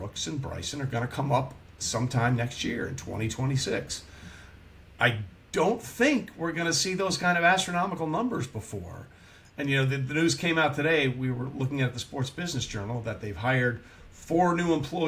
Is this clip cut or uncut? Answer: uncut